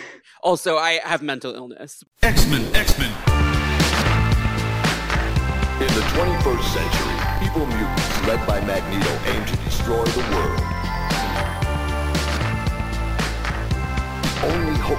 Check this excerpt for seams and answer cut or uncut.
cut